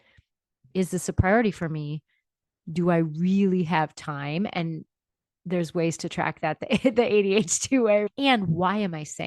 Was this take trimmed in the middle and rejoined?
yes; 1 cut; at 8.1 s

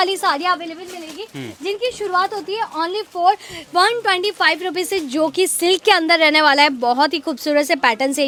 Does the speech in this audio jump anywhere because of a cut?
no; 0 cuts

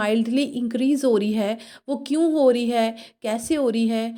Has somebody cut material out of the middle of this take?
no; 0 cuts

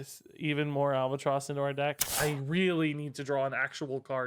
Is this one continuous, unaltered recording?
no; 1 cut; at 2.1 s

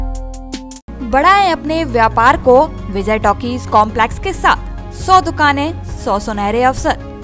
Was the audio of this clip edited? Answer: no; 0 cuts

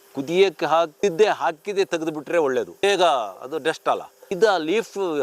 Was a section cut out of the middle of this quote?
yes; 3 cuts; at 0.9 s, 2.8 s, 4.2 s

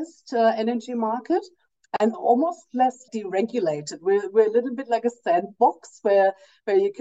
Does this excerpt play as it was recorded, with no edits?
no; 1 cut; at 2.1 s

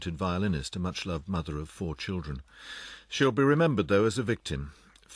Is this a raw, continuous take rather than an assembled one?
yes; 0 cuts

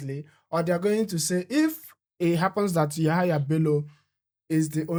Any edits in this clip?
no; 0 cuts

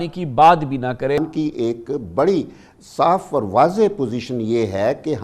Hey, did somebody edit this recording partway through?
yes; 1 cut; at 1.2 s

